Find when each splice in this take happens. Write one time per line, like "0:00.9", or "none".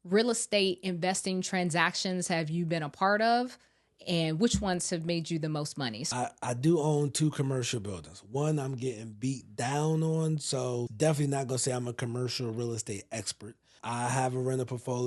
0:06.0
0:10.9
0:13.8

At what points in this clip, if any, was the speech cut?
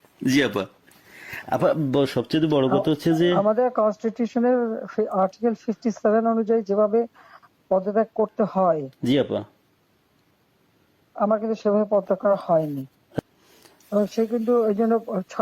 0:13.2

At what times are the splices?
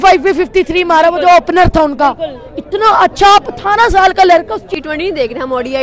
0:04.7

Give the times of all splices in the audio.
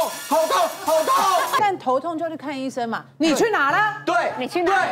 0:01.6

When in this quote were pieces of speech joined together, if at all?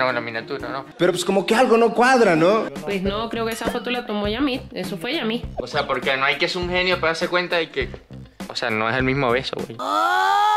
none

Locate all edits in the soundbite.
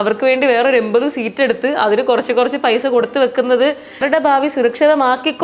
0:04.0

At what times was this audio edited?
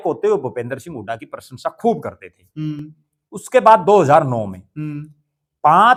none

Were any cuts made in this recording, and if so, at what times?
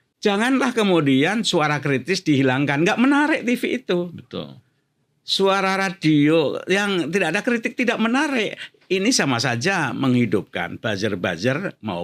none

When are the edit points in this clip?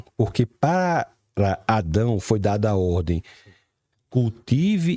none

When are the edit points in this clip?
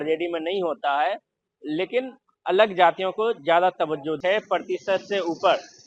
0:04.2

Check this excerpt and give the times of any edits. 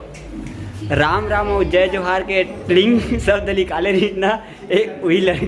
none

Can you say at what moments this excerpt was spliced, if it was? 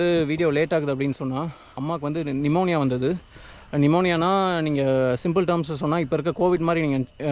0:01.8

